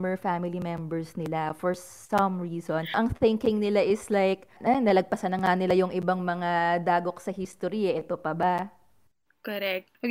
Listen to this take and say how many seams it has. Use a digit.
0